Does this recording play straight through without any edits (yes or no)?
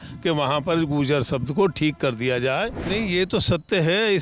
no